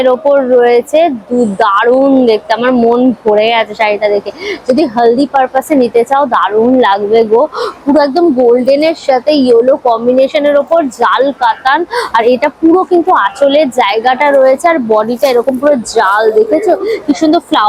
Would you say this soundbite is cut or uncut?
uncut